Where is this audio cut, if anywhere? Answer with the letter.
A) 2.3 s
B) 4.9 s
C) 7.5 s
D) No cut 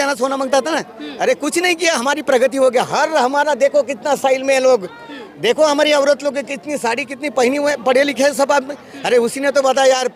D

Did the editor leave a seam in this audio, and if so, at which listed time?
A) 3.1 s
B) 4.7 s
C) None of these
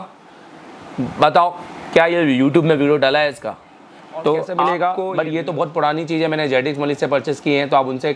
B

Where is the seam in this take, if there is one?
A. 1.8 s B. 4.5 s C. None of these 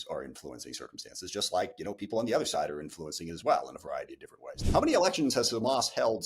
B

